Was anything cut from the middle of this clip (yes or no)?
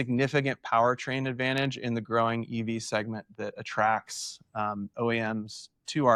no